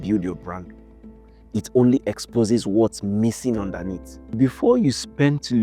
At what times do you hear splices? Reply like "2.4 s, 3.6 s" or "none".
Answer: 4.4 s